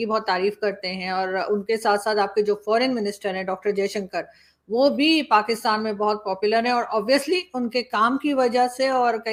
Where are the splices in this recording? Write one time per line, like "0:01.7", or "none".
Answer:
none